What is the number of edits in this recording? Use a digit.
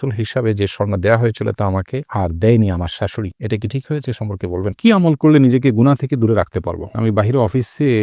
2